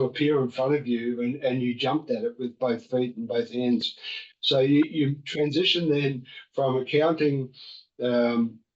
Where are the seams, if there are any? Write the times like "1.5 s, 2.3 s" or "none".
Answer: none